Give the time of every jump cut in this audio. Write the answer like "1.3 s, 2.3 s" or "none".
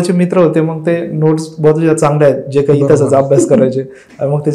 none